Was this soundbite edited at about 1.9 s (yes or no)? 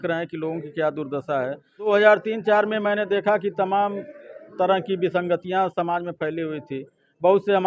yes